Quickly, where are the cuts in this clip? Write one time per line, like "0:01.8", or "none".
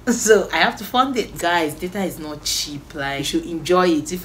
0:01.3
0:03.2